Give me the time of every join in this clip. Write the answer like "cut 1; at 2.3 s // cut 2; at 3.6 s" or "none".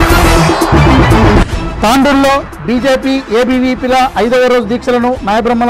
cut 1; at 1.6 s